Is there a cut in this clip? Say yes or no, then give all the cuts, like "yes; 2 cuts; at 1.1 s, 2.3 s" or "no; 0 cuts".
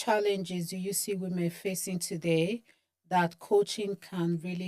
no; 0 cuts